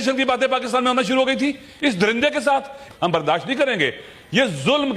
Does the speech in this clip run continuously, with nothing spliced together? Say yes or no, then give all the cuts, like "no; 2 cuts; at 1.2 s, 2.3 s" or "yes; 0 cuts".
no; 1 cut; at 2.8 s